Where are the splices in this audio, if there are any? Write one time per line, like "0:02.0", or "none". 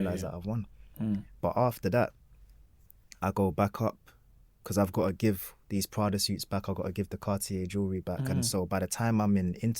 none